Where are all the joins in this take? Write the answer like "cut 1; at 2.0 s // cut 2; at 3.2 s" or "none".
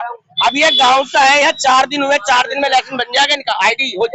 none